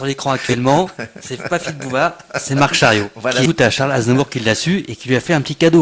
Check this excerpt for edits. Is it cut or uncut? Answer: cut